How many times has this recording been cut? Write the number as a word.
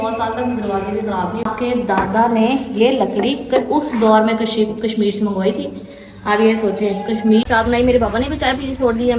two